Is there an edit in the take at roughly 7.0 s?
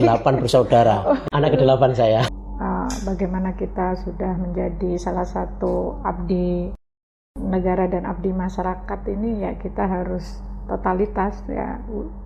no; 2 cuts; at 1.2 s, 2.3 s

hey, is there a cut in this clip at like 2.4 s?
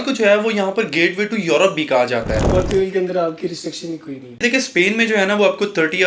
yes; 2 cuts; at 2.4 s, 4.4 s

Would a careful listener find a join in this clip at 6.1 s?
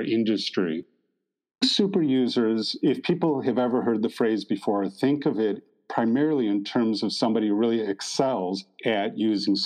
no; 2 cuts; at 1.1 s, 8.7 s

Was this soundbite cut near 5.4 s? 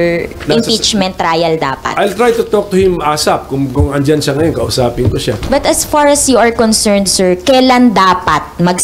yes; 1 cut; at 5.4 s

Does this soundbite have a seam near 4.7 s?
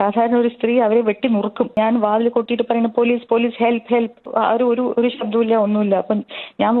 no; 1 cut; at 1.8 s

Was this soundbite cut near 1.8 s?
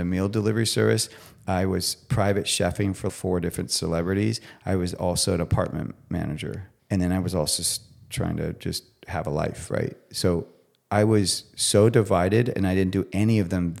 no; 2 cuts; at 3.1 s, 6.7 s

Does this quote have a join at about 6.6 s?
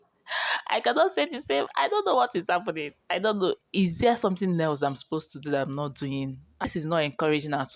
yes; 1 cut; at 6.6 s

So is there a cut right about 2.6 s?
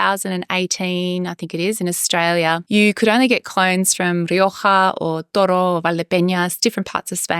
yes; 1 cut; at 2.6 s

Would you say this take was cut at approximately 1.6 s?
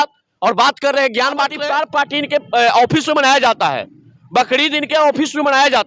yes; 1 cut; at 1.6 s

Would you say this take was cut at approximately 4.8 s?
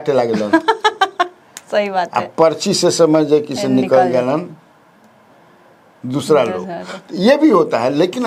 no; 0 cuts

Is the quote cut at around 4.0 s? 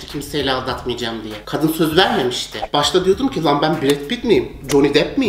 no; 2 cuts; at 1.3 s, 2.6 s

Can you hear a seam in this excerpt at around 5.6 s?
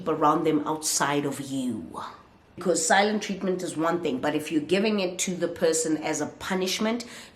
no; 1 cut; at 2.6 s

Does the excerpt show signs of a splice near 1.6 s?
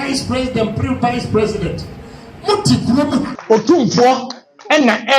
no; 1 cut; at 3.4 s

